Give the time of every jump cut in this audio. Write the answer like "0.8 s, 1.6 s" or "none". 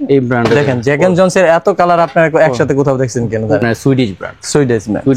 3.6 s